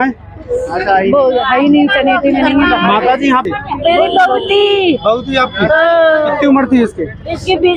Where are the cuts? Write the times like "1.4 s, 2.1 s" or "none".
3.5 s